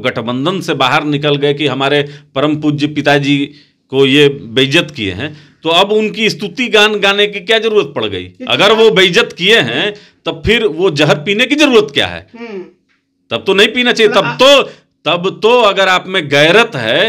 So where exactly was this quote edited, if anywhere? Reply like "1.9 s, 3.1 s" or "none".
none